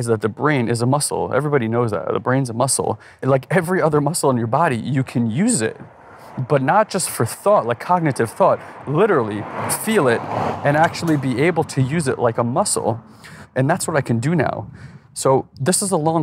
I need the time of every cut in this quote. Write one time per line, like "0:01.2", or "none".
0:03.1